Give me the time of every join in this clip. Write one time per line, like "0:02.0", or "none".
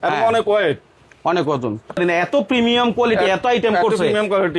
0:02.0